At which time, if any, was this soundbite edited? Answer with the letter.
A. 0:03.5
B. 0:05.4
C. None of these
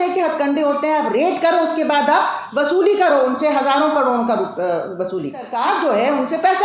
B